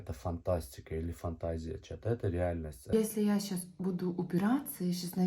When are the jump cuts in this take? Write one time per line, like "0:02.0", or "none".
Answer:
0:02.9